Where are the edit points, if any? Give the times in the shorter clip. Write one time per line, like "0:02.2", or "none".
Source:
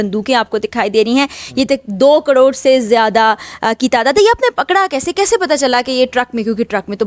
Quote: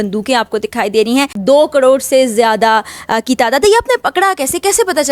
0:01.4